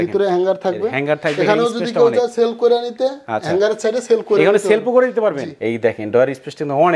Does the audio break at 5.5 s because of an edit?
yes; 1 cut; at 5.5 s

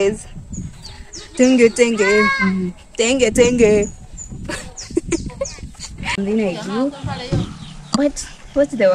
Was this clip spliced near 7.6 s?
no; 1 cut; at 6.2 s

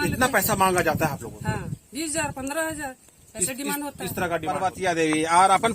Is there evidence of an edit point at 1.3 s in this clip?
no; 1 cut; at 4.6 s

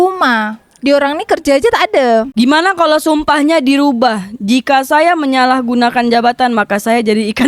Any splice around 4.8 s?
no; 1 cut; at 2.3 s

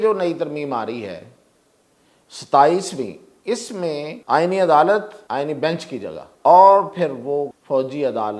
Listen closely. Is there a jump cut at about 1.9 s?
no; 4 cuts; at 4.1 s, 5.2 s, 6.3 s, 7.5 s

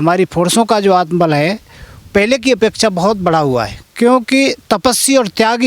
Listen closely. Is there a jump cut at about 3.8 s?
yes; 1 cut; at 3.8 s

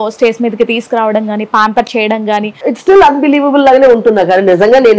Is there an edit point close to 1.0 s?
no; 1 cut; at 2.6 s

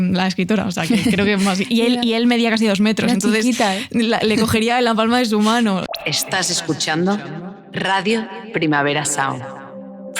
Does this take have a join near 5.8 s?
yes; 1 cut; at 5.8 s

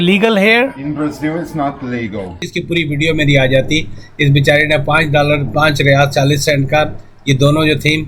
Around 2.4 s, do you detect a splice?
yes; 1 cut; at 2.4 s

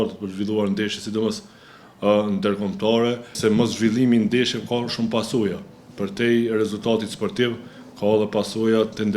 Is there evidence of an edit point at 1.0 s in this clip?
no; 1 cut; at 3.4 s

